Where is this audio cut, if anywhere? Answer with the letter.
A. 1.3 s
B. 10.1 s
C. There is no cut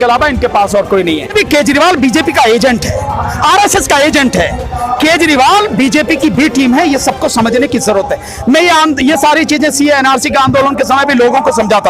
A